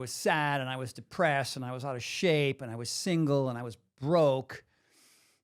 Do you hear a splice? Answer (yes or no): no